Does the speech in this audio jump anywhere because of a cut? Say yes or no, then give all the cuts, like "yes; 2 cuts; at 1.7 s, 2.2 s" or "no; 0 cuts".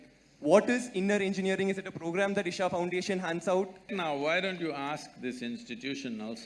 yes; 1 cut; at 3.9 s